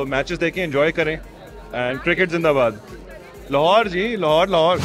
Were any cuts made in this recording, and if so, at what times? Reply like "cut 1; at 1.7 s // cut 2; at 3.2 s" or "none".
none